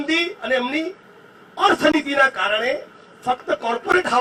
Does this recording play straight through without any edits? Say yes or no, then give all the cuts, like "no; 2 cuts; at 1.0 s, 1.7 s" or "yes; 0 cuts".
yes; 0 cuts